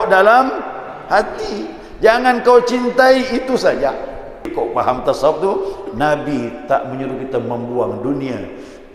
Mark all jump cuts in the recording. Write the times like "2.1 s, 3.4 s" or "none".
4.5 s